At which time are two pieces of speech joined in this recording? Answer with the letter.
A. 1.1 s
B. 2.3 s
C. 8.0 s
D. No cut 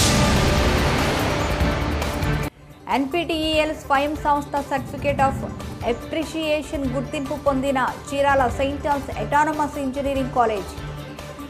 B